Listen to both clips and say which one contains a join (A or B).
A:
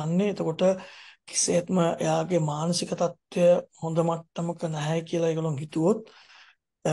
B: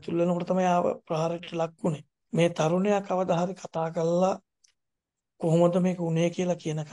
B